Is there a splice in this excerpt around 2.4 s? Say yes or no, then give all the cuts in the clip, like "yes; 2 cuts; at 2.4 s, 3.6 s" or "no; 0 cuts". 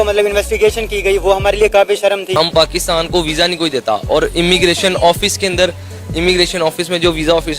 yes; 1 cut; at 2.4 s